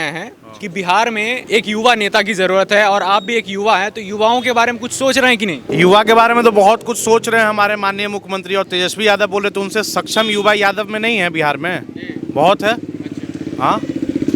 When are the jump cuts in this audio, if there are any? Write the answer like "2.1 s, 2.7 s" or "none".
1.4 s, 5.6 s